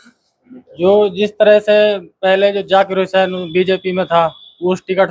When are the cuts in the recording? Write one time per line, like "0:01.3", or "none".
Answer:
none